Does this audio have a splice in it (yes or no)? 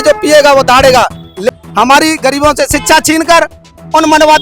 yes